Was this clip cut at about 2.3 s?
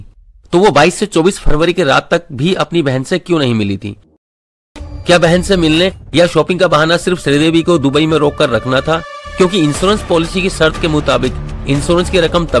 no; 1 cut; at 4.3 s

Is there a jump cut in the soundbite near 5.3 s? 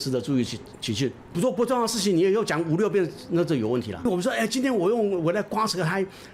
no; 2 cuts; at 1.3 s, 4.1 s

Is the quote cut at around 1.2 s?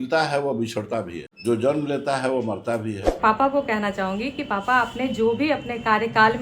yes; 2 cuts; at 1.2 s, 3.0 s

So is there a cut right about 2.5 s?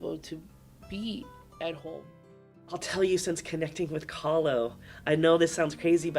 yes; 1 cut; at 2.5 s

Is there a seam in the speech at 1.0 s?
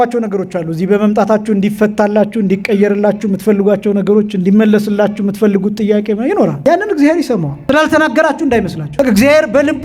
no; 3 cuts; at 6.6 s, 7.5 s, 8.8 s

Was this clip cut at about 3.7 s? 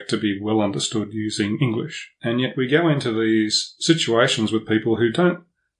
no; 1 cut; at 2.0 s

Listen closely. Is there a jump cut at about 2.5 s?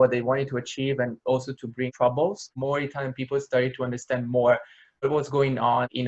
yes; 2 cuts; at 2.5 s, 5.0 s

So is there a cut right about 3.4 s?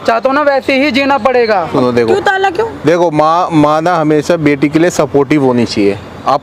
no; 1 cut; at 1.7 s

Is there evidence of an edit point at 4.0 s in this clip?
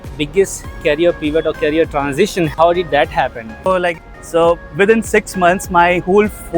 yes; 1 cut; at 4.0 s

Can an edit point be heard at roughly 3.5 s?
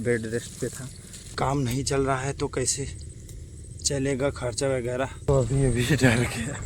no; 2 cuts; at 1.3 s, 5.3 s

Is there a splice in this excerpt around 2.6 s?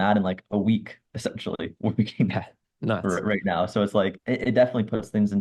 no; 1 cut; at 4.2 s

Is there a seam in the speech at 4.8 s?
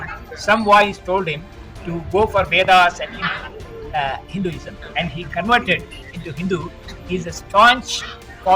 yes; 1 cut; at 4.8 s

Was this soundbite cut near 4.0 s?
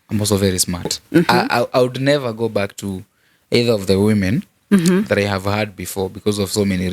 no; 1 cut; at 1.0 s

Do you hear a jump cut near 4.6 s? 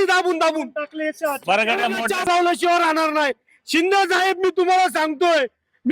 no; 1 cut; at 2.3 s

